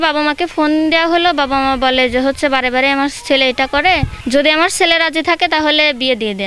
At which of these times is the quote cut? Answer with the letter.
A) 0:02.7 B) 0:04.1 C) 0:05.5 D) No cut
B